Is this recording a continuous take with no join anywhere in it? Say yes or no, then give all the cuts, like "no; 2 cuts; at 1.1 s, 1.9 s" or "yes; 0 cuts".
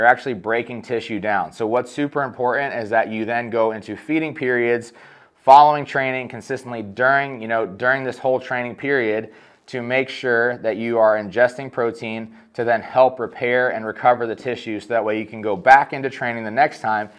yes; 0 cuts